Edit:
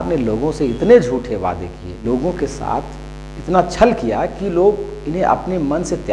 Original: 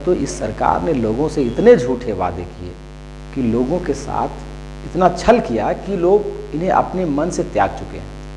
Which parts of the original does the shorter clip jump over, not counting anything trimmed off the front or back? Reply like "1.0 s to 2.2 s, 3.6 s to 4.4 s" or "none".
2.8 s to 3.5 s